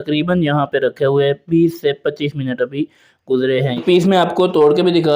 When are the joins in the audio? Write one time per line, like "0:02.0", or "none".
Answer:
0:03.8